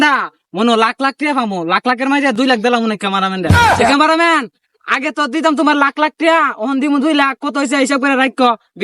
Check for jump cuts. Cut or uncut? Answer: uncut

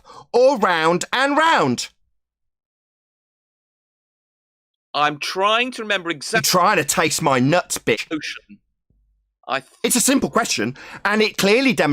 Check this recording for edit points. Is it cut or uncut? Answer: cut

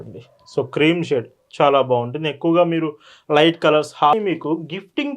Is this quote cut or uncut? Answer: cut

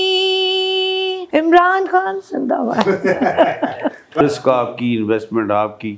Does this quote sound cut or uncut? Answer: cut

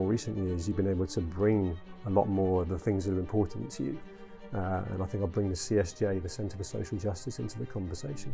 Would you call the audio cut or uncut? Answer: uncut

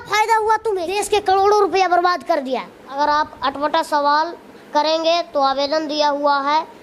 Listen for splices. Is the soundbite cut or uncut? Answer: cut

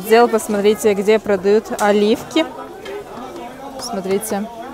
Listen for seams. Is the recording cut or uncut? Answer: uncut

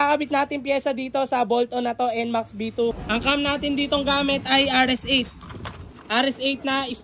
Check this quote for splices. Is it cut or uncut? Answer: cut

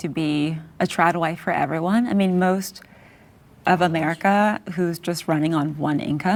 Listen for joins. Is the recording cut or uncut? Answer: uncut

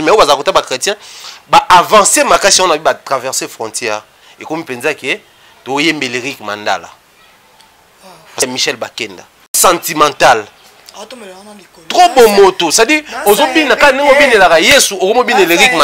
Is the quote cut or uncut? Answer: cut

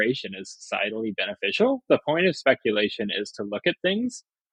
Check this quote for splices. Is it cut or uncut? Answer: uncut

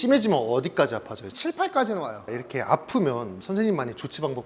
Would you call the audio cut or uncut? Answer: cut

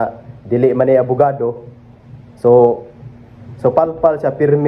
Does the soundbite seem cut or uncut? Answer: uncut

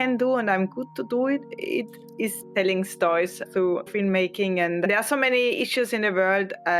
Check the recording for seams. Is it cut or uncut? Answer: cut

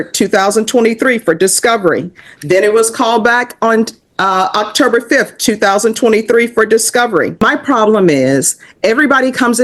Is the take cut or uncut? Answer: cut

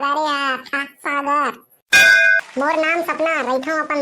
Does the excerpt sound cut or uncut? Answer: cut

